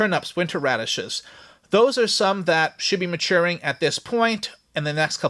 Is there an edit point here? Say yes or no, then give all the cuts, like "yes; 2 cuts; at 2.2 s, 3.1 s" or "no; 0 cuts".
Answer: no; 0 cuts